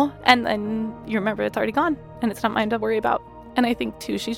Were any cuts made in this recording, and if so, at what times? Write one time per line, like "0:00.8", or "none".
0:03.2